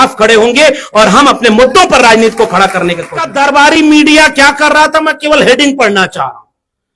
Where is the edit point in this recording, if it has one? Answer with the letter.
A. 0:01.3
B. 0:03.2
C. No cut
B